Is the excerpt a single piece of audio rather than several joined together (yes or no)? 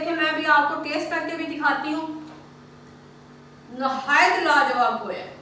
yes